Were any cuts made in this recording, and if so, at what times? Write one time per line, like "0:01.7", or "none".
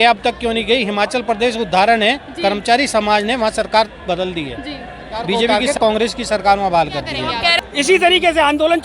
0:05.5
0:07.6